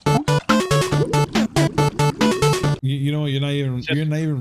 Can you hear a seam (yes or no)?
yes